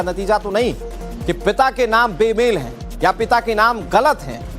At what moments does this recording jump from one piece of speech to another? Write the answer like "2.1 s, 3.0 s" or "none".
2.1 s